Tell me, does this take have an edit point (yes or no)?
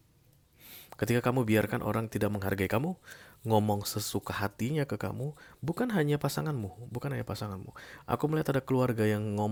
no